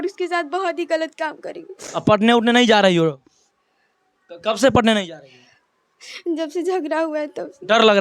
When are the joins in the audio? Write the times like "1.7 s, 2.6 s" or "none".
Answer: none